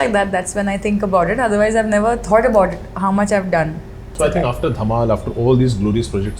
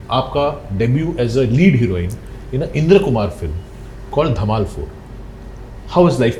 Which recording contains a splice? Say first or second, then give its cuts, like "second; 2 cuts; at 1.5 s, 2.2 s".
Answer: first; 1 cut; at 4.0 s